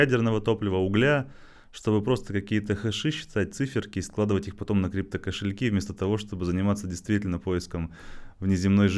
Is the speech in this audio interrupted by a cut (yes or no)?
no